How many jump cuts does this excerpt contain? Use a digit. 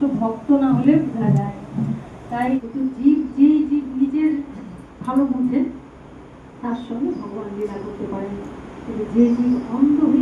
1